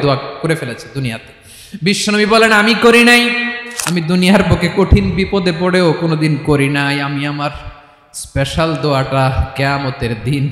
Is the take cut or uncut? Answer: cut